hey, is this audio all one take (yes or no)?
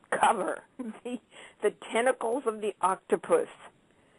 no